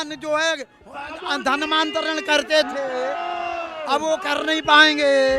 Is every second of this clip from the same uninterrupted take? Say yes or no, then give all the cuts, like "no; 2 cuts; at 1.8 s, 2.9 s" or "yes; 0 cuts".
yes; 0 cuts